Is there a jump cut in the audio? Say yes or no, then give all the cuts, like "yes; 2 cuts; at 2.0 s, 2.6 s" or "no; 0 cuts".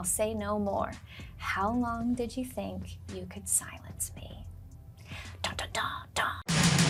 no; 0 cuts